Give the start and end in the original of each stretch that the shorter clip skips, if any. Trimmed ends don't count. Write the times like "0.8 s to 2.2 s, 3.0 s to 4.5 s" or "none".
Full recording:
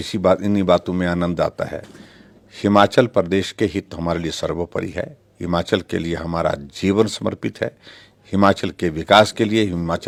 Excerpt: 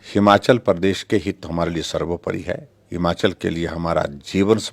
none